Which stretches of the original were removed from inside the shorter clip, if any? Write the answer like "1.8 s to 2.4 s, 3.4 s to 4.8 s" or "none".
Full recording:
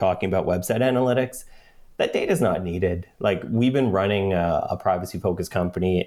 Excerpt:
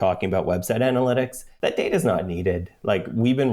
1.4 s to 1.8 s